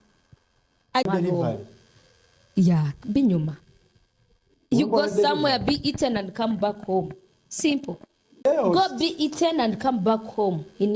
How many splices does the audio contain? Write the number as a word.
two